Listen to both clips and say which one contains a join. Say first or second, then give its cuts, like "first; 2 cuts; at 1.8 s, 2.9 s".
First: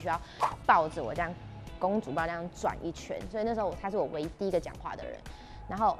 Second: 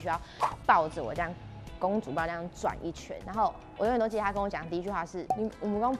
second; 2 cuts; at 3.1 s, 5.2 s